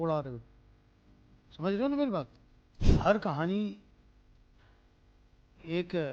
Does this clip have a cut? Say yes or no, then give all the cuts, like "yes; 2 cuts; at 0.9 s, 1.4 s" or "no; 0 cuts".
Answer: yes; 1 cut; at 2.8 s